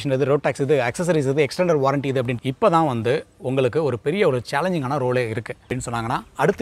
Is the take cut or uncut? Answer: cut